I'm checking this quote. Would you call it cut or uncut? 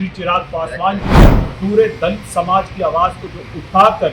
cut